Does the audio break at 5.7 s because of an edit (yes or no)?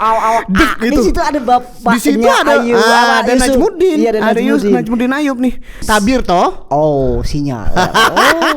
yes